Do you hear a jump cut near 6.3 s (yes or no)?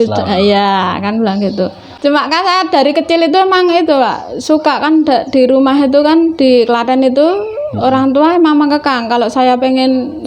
no